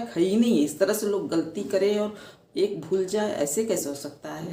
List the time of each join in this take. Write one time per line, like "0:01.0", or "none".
none